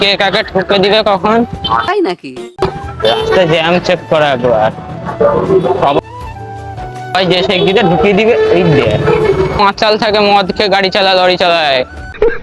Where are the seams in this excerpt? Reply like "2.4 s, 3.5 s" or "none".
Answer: 1.9 s, 9.6 s